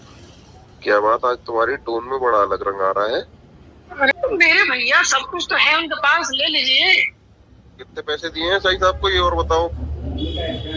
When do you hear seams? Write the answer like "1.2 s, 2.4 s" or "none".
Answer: 4.1 s